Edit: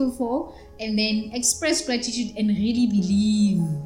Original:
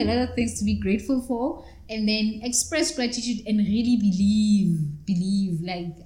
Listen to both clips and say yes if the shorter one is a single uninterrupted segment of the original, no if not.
yes